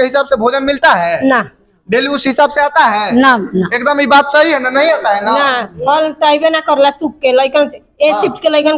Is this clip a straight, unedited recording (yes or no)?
yes